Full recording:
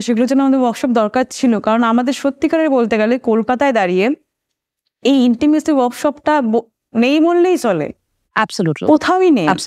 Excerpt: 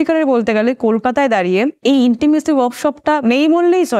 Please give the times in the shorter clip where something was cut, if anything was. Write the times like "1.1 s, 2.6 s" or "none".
1.8 s, 3.2 s